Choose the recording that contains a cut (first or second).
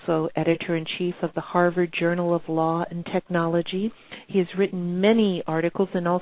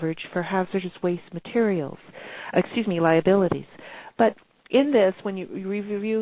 first